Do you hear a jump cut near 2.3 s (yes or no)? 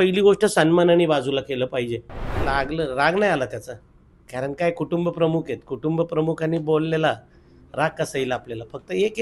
yes